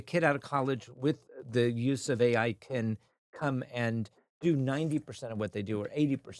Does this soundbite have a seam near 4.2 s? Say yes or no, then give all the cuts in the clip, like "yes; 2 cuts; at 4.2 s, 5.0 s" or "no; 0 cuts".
no; 0 cuts